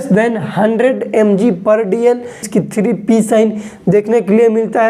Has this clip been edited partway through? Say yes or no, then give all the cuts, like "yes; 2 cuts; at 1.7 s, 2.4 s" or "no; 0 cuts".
yes; 1 cut; at 2.5 s